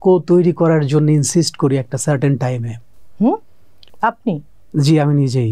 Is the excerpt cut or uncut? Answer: uncut